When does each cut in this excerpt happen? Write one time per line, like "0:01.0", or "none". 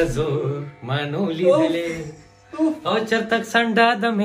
none